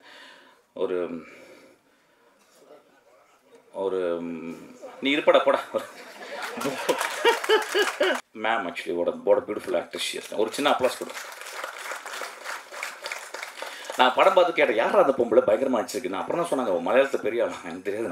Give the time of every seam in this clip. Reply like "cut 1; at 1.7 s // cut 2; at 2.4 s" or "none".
cut 1; at 8.3 s